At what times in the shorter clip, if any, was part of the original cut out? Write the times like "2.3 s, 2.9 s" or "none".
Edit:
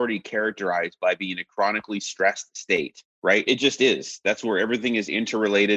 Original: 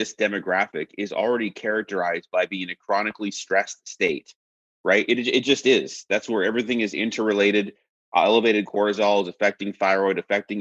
3.5 s